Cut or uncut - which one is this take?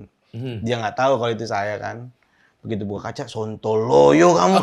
uncut